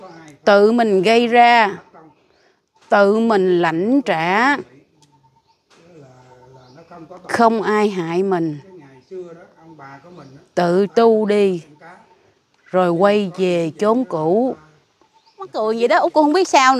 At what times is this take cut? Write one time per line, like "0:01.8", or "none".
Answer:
0:15.5